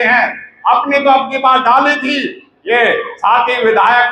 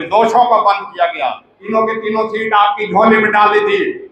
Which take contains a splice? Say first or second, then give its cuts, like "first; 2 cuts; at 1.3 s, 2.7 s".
second; 1 cut; at 1.5 s